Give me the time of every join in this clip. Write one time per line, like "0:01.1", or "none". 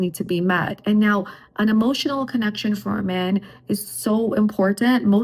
none